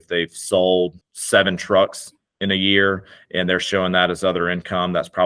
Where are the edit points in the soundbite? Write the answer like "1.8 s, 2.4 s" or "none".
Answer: 1.1 s